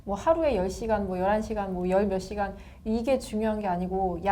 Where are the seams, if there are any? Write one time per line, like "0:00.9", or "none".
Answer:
none